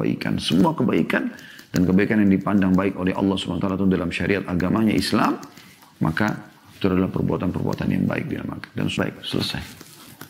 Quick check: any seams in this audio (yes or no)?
yes